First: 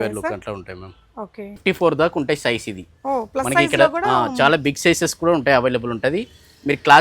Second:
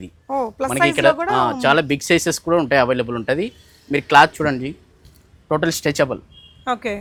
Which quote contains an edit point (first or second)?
first